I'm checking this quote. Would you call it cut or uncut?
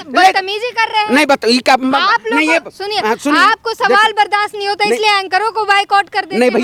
uncut